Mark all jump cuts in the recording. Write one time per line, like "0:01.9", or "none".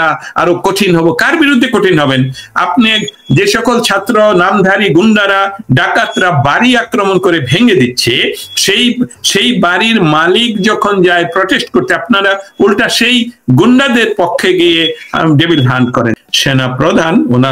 0:16.2